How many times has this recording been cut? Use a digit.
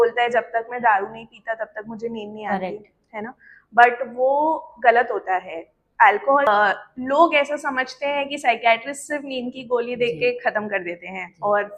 2